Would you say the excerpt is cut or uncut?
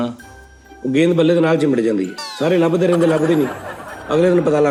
uncut